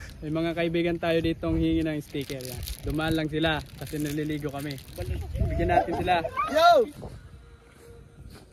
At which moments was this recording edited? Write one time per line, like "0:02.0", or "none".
0:07.0